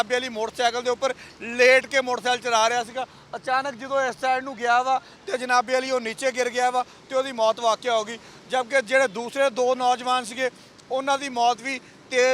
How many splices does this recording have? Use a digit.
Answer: 0